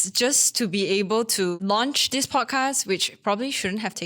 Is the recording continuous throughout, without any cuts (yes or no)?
no